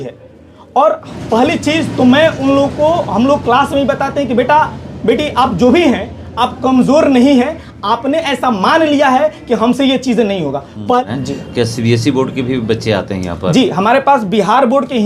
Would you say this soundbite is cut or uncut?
cut